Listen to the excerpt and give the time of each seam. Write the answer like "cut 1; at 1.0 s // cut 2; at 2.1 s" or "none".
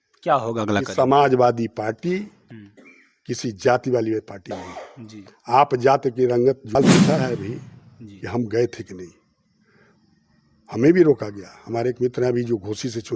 cut 1; at 6.7 s